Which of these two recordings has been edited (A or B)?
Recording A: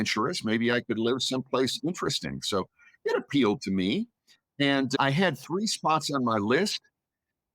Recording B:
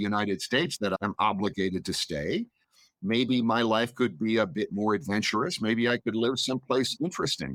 A